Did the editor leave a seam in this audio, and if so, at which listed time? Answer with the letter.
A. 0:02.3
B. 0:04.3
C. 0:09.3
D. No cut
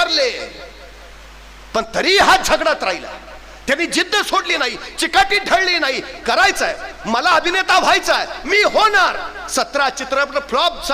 D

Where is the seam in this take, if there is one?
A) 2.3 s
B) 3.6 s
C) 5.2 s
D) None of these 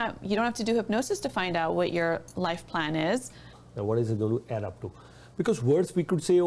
B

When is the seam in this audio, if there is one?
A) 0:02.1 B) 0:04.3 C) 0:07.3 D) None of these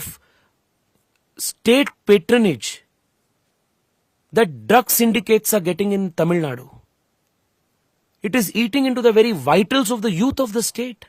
D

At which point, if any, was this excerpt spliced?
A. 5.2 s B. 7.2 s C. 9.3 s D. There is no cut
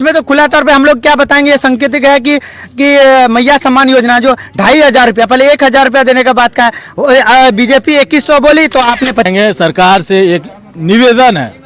C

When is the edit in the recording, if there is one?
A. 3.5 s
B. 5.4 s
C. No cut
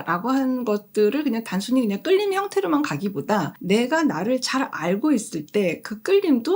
A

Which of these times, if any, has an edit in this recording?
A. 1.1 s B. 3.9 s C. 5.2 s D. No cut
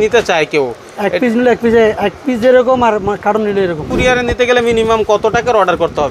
B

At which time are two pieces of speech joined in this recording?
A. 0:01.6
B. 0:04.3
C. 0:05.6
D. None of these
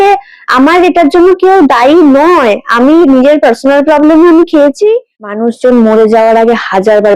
C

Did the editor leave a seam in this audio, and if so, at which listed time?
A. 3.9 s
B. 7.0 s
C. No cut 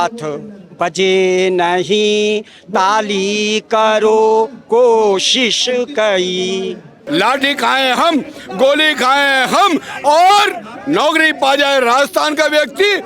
B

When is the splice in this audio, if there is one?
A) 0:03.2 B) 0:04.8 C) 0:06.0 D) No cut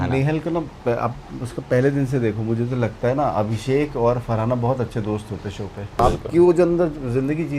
C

